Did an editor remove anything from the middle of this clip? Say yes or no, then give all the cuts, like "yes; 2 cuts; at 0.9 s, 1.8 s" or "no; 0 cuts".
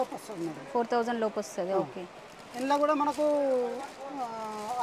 no; 0 cuts